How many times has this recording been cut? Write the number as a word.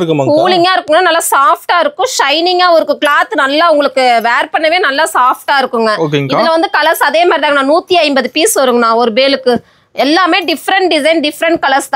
zero